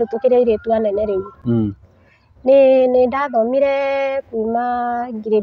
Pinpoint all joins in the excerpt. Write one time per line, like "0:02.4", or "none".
none